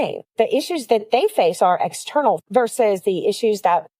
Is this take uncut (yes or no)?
no